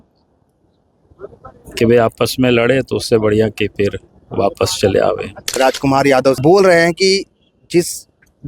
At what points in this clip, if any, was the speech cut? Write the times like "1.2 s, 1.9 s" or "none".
5.6 s